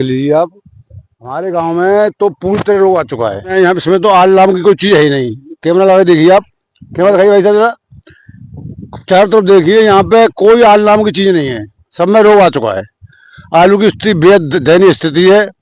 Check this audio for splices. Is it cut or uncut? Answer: cut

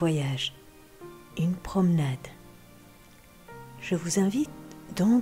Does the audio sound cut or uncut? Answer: uncut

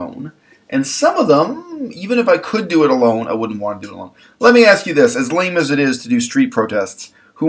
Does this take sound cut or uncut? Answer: uncut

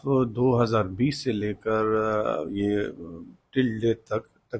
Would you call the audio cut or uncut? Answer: uncut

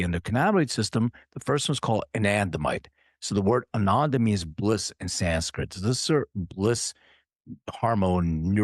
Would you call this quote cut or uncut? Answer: uncut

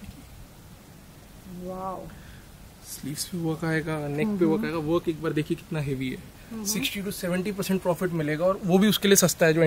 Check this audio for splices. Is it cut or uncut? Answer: cut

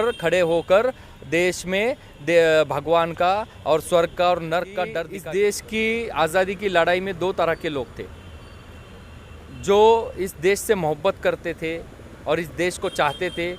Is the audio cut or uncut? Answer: cut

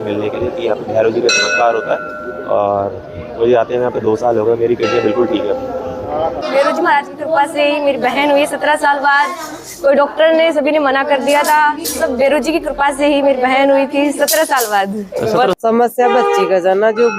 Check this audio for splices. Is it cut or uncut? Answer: cut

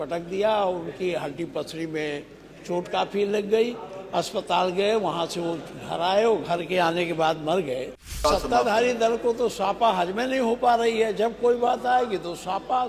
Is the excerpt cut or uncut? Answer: cut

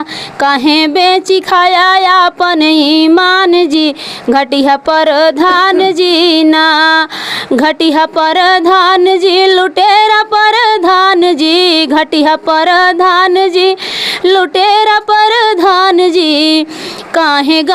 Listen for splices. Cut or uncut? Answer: uncut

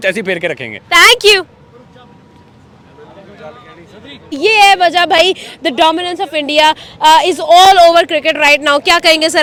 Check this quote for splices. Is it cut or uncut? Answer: uncut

